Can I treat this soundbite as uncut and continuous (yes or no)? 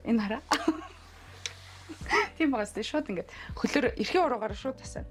yes